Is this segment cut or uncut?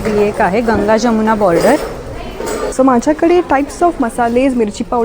cut